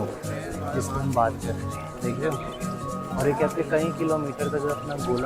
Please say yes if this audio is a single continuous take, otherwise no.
yes